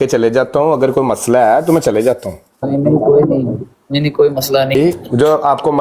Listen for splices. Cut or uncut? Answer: cut